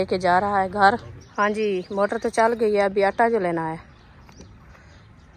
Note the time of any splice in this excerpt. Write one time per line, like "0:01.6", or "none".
0:01.2